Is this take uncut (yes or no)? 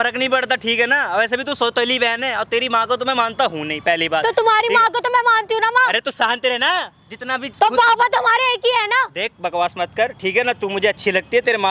yes